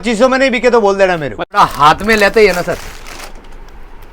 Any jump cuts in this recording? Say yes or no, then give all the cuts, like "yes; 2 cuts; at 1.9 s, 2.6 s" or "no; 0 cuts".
yes; 1 cut; at 1.4 s